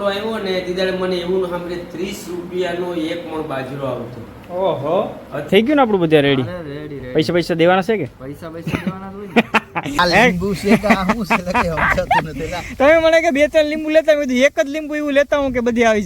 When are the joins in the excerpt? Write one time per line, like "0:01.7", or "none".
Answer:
0:05.5
0:10.0